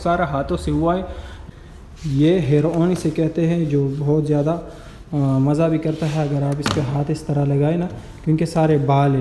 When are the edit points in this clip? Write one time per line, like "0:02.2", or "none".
0:01.3

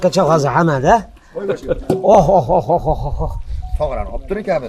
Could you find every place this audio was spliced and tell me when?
none

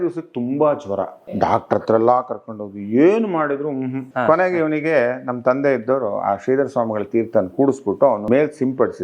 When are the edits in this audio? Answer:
0:01.3
0:04.1
0:08.2

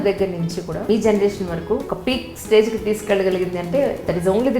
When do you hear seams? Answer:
0:00.9
0:01.9

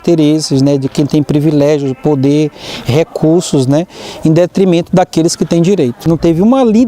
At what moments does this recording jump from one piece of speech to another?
0:06.0

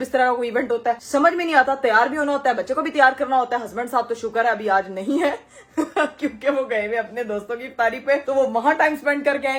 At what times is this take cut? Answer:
none

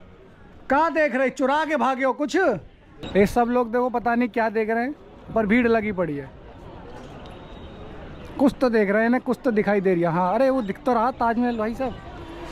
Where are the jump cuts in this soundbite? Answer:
0:02.9

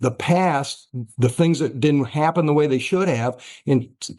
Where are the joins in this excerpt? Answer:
none

